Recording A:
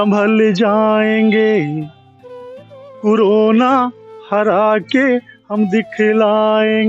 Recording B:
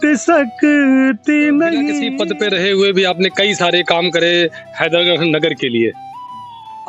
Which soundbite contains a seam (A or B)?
B